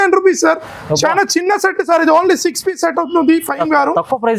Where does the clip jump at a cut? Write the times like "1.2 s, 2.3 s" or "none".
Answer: none